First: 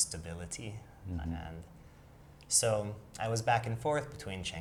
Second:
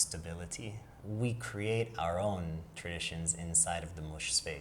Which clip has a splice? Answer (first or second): second